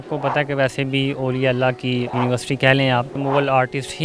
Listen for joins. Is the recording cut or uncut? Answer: cut